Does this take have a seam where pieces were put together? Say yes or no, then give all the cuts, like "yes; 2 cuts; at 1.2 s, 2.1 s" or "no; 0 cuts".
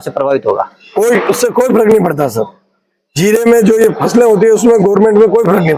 no; 0 cuts